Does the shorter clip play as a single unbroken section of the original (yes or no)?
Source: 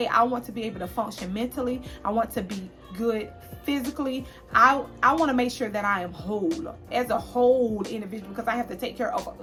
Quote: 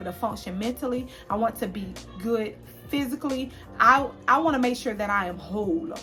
yes